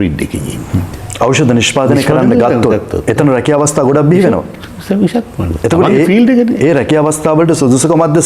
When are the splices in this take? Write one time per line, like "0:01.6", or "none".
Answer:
0:01.0